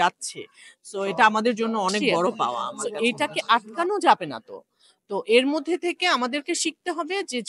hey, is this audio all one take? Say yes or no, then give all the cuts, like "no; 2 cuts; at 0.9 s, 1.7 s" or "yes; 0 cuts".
no; 1 cut; at 2.8 s